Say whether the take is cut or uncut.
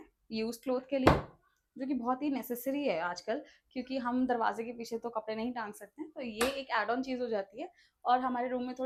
uncut